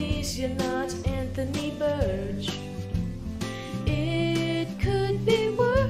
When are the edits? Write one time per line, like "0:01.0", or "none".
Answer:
none